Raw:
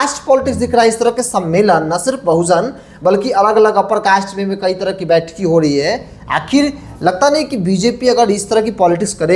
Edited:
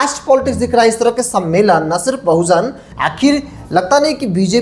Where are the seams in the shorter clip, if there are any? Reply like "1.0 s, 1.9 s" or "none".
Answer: 2.8 s

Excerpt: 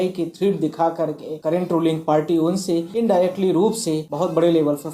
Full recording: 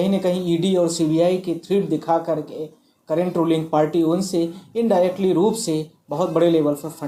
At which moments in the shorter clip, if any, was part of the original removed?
1.3 s, 2.9 s, 4.1 s

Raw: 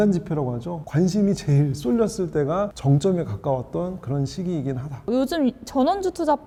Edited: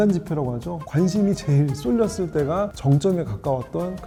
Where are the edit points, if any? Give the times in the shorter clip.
none

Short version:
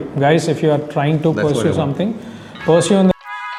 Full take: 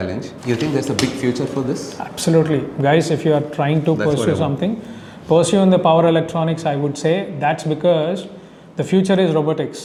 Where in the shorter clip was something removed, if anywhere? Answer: none

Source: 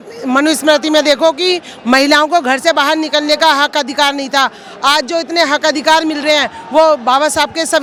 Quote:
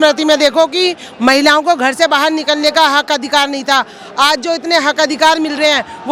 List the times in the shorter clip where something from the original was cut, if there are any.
none

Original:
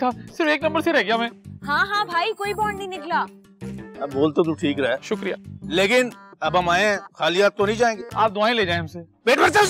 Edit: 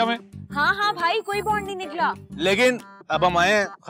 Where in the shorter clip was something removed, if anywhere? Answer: 2.3 s

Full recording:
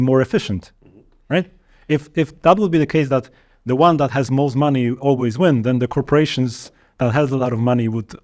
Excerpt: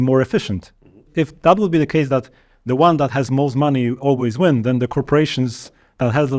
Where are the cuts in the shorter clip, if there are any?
1.1 s

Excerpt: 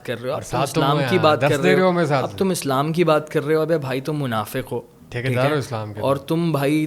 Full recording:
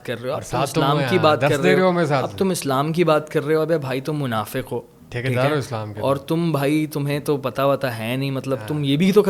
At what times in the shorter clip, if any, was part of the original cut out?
none

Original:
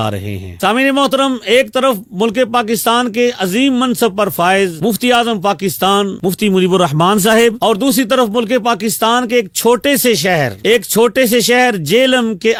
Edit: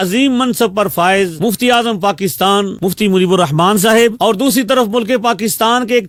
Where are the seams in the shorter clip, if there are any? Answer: none

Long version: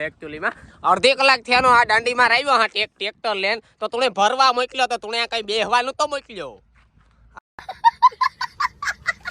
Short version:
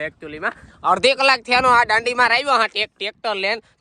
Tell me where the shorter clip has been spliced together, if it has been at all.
none

